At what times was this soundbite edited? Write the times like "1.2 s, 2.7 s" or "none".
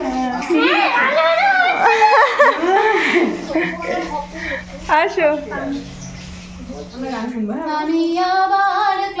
6.9 s